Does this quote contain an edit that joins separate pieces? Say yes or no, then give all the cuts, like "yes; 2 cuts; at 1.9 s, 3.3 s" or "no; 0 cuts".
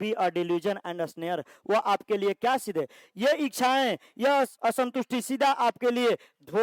no; 0 cuts